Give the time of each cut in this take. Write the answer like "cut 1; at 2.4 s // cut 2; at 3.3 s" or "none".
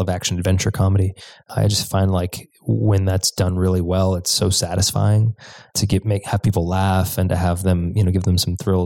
cut 1; at 1.5 s // cut 2; at 5.7 s

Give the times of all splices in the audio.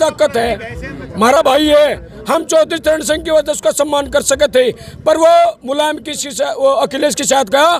none

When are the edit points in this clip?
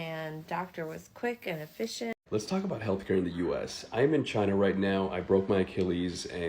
cut 1; at 2.1 s

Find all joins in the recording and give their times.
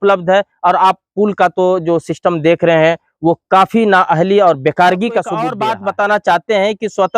cut 1; at 5.5 s

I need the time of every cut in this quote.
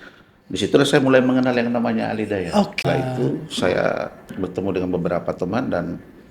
cut 1; at 2.8 s

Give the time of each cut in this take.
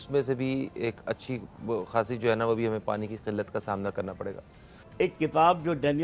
none

